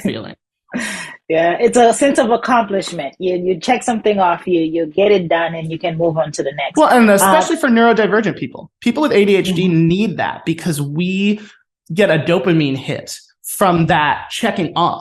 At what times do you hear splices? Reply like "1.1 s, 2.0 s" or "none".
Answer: none

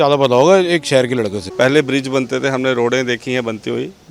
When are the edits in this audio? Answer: 1.5 s

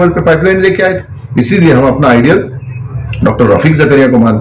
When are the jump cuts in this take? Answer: none

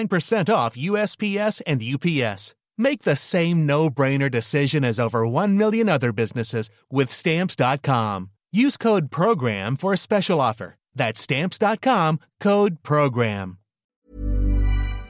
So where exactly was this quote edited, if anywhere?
13.9 s

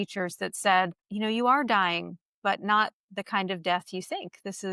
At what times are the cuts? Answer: none

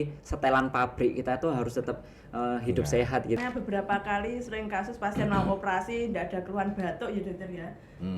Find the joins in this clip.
3.4 s

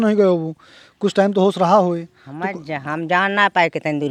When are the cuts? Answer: none

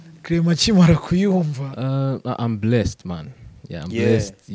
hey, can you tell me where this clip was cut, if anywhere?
1.7 s

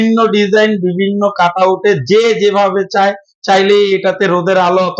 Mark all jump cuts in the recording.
none

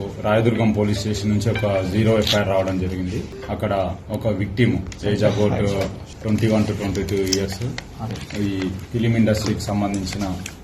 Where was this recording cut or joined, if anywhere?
3.4 s, 6.1 s

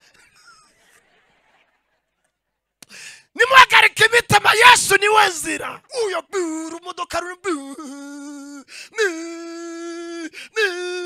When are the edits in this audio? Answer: 5.8 s

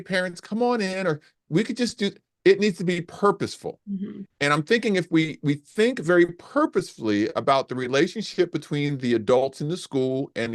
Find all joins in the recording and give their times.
3.8 s

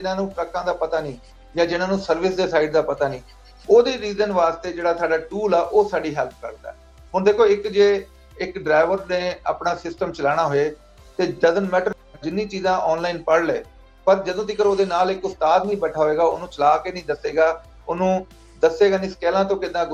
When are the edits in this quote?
none

